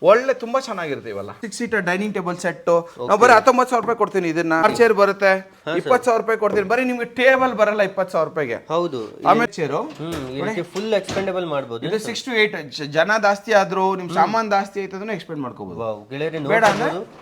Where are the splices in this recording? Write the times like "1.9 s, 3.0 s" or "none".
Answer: 1.4 s, 4.6 s, 9.5 s